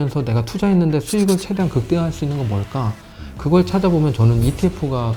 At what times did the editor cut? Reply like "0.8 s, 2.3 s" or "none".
none